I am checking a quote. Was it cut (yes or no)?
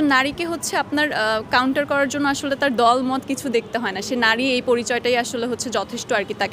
no